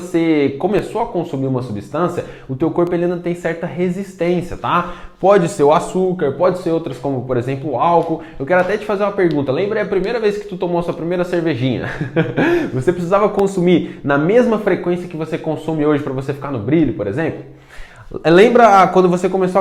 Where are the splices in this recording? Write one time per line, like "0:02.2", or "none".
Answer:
none